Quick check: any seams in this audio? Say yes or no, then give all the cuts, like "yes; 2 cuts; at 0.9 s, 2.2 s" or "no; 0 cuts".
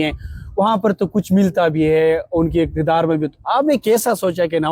no; 0 cuts